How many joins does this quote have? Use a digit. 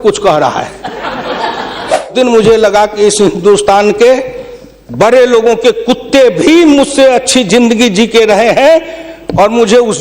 1